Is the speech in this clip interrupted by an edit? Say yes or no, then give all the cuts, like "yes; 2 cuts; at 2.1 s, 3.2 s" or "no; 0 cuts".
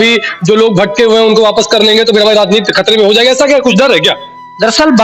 no; 0 cuts